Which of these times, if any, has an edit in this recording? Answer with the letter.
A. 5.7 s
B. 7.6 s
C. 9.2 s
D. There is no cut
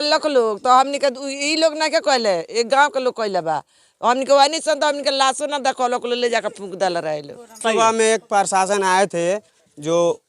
B